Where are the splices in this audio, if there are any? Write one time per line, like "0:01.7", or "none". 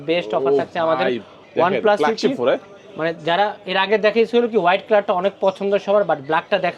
none